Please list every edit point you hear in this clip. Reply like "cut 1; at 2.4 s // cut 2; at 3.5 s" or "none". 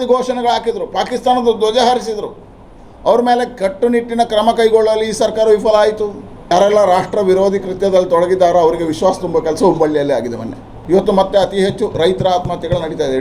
cut 1; at 6.5 s // cut 2; at 10.7 s